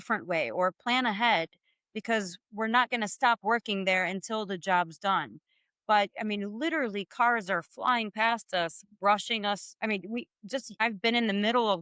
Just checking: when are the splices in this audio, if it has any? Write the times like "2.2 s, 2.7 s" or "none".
9.7 s, 10.8 s